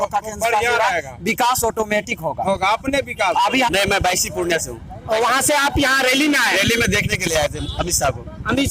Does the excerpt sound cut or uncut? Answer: cut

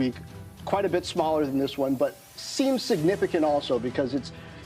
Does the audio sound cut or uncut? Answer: cut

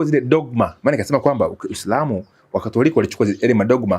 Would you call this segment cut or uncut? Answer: uncut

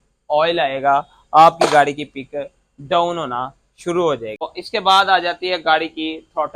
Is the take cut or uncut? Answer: cut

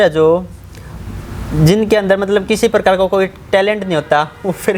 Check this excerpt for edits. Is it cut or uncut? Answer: uncut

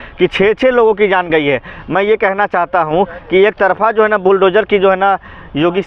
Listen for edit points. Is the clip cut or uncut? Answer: uncut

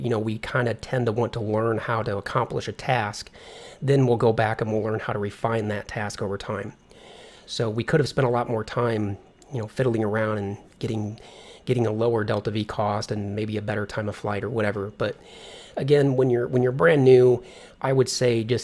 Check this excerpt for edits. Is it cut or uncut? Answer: cut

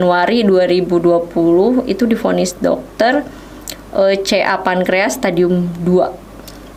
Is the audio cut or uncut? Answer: uncut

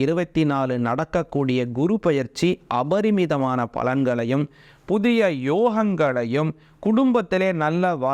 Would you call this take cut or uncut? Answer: uncut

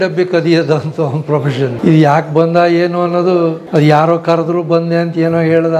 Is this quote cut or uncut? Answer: cut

